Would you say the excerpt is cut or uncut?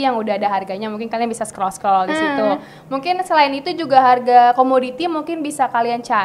uncut